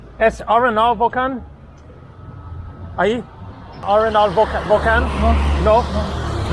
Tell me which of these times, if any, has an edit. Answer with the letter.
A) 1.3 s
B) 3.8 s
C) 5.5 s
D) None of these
B